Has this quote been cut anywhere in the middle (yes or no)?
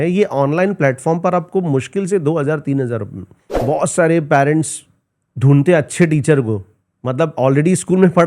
yes